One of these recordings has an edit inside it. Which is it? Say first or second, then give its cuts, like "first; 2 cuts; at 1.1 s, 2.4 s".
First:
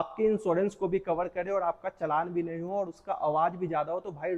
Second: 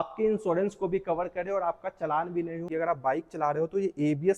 second; 1 cut; at 2.7 s